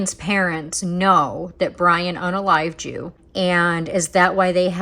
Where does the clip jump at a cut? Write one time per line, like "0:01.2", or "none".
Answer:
0:03.2